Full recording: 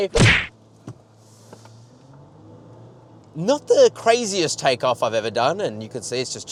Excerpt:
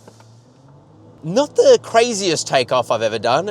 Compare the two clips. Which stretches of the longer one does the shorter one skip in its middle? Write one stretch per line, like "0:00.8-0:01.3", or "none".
0:02.6-0:03.3